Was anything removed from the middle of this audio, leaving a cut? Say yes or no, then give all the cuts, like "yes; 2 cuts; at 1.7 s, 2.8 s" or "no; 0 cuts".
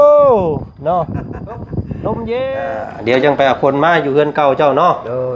yes; 1 cut; at 2.7 s